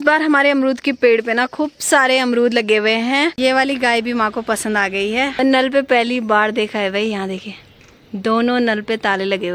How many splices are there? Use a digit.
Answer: 2